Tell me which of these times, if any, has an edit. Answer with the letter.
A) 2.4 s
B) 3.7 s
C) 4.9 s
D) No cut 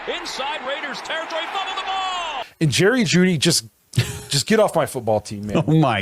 A